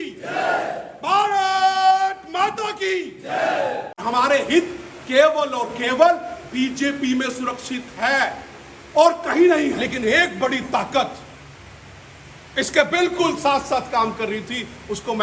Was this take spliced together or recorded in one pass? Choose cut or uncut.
cut